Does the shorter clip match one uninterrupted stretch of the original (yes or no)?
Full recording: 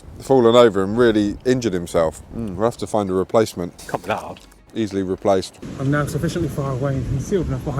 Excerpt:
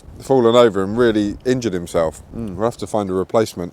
yes